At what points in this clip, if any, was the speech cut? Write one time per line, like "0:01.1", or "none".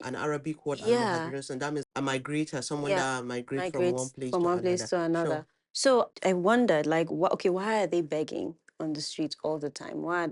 0:06.1

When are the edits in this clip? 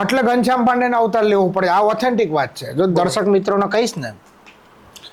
none

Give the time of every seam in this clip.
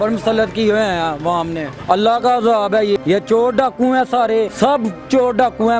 0:01.7
0:03.0
0:04.5

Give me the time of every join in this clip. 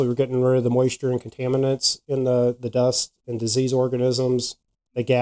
none

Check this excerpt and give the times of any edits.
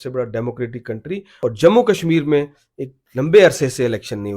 0:01.3

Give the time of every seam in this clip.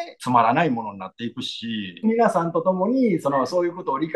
0:02.0

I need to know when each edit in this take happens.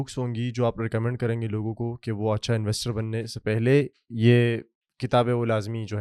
none

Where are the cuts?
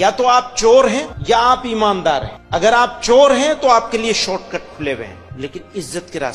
0:01.1
0:02.3
0:05.2

